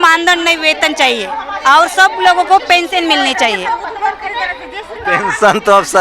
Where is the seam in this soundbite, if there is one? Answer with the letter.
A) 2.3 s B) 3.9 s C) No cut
C